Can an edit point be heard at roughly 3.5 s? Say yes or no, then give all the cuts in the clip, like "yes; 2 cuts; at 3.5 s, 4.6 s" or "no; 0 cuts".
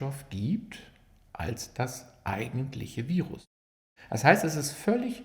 yes; 1 cut; at 3.5 s